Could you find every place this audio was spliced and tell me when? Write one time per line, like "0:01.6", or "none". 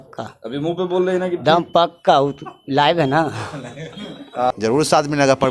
0:04.5